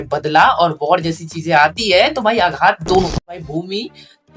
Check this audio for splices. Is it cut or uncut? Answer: cut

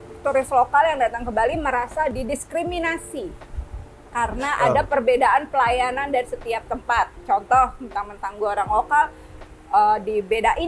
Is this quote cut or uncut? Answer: uncut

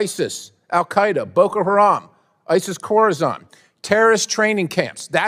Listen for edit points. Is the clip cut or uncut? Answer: uncut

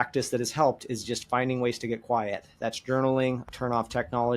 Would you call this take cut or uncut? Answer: cut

